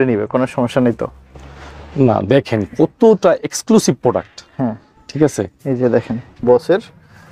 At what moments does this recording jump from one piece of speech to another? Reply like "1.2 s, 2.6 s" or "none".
6.2 s